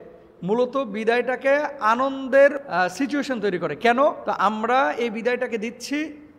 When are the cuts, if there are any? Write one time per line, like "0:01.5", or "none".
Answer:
0:02.6
0:04.2